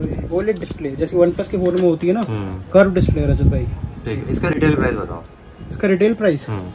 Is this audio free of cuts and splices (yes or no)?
yes